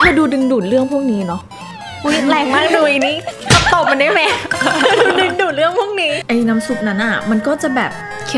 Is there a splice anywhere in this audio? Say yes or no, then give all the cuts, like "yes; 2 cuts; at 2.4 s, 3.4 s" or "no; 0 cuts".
yes; 1 cut; at 6.2 s